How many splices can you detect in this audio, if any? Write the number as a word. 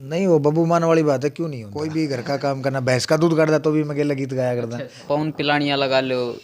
two